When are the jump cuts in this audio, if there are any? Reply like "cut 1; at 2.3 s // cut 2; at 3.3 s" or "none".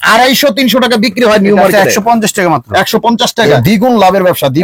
cut 1; at 3.5 s